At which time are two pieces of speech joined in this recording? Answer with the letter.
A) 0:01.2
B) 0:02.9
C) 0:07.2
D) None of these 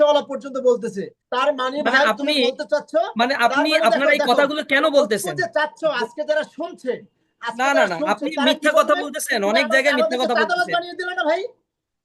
A